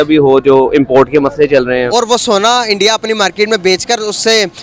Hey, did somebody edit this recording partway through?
yes; 1 cut; at 1.9 s

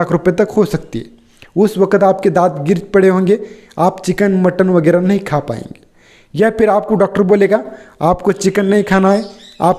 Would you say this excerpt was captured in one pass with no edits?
yes; 0 cuts

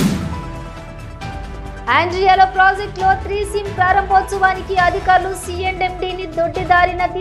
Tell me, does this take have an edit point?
yes; 1 cut; at 1.2 s

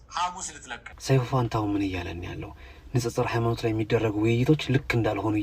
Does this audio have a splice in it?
yes; 1 cut; at 1.0 s

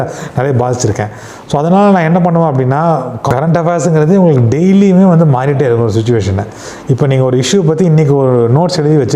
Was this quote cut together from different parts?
yes; 1 cut; at 3.2 s

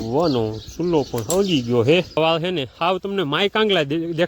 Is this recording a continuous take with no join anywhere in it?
no; 1 cut; at 2.2 s

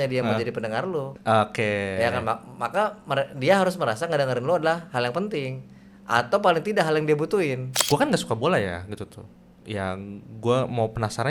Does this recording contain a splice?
yes; 2 cuts; at 1.1 s, 7.7 s

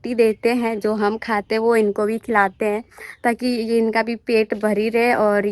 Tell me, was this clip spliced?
no; 0 cuts

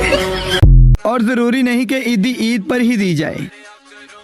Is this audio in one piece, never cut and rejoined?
no; 1 cut; at 0.9 s

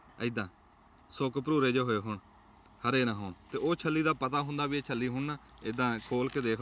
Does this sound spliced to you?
no; 0 cuts

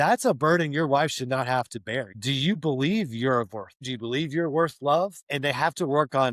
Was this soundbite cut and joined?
yes; 3 cuts; at 2.1 s, 3.8 s, 5.2 s

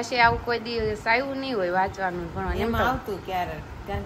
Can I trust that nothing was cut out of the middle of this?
yes; 0 cuts

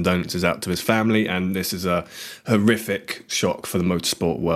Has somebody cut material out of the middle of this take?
no; 0 cuts

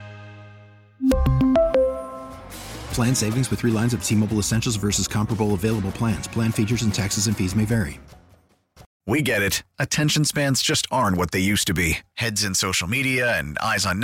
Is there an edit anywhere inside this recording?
yes; 1 cut; at 8.9 s

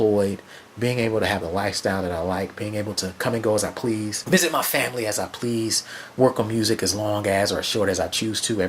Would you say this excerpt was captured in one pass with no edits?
no; 1 cut; at 4.2 s

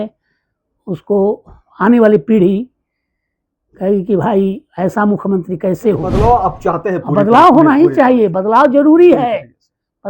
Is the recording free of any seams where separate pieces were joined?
no; 1 cut; at 6.1 s

